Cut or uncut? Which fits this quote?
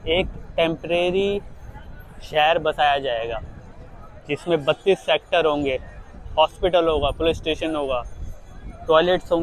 uncut